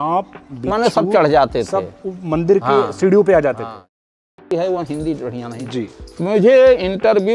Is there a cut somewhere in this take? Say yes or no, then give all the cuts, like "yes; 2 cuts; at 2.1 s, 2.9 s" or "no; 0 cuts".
yes; 1 cut; at 3.9 s